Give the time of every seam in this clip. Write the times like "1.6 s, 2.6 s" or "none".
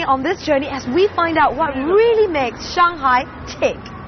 2.7 s